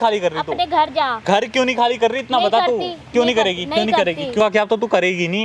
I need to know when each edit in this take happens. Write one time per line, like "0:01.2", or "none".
0:04.4